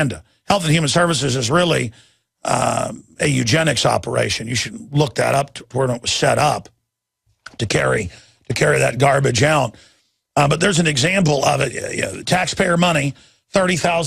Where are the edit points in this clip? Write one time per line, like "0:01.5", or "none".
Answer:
0:02.0